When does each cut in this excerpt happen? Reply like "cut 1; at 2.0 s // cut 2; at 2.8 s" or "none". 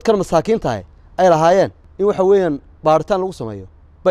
cut 1; at 1.8 s

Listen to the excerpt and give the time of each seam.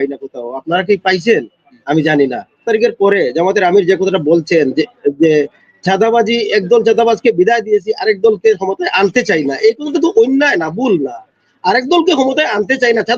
cut 1; at 2.6 s

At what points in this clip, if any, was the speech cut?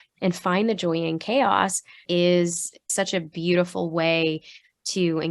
cut 1; at 2.0 s // cut 2; at 2.9 s

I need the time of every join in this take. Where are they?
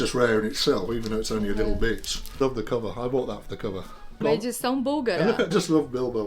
cut 1; at 2.3 s // cut 2; at 4.2 s // cut 3; at 5.5 s

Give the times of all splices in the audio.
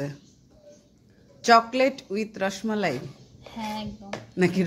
none

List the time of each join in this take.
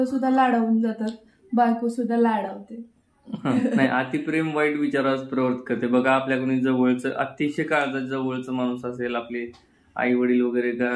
cut 1; at 3.6 s

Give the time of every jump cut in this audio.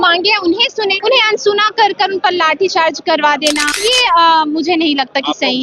cut 1; at 1.0 s // cut 2; at 3.7 s

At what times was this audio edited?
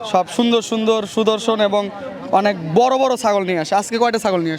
none

